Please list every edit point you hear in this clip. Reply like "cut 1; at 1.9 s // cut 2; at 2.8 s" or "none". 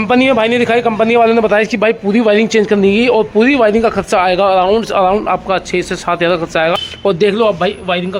cut 1; at 6.9 s